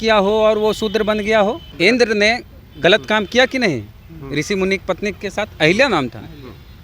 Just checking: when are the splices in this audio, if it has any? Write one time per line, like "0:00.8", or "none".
0:01.7